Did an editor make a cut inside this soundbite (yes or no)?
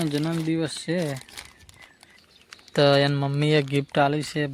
yes